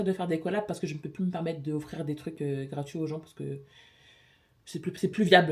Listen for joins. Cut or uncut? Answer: uncut